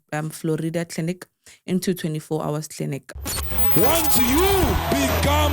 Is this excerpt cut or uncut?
cut